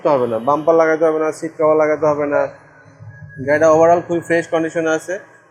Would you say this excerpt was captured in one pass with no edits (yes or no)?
yes